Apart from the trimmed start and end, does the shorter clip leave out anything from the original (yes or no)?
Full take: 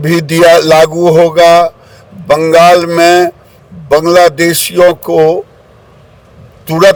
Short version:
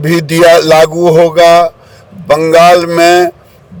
no